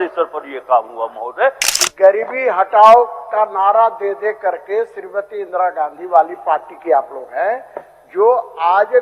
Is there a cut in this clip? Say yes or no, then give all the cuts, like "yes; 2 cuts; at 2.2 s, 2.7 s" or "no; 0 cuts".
yes; 1 cut; at 1.7 s